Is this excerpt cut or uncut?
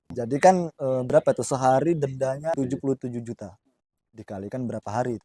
uncut